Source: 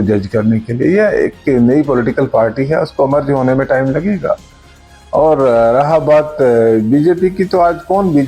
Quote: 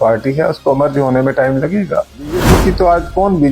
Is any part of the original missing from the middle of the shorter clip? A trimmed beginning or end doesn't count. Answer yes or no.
yes